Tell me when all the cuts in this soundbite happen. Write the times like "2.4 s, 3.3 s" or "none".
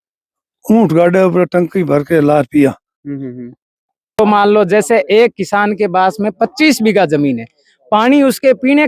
4.2 s